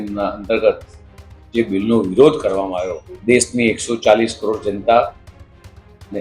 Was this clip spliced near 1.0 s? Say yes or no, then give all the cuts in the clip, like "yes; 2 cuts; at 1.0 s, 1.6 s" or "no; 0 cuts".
no; 1 cut; at 3.1 s